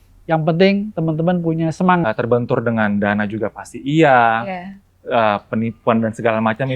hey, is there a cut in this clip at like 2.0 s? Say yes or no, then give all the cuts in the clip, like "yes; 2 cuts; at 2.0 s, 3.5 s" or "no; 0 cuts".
yes; 1 cut; at 2.0 s